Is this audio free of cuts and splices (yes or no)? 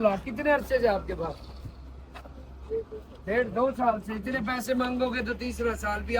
yes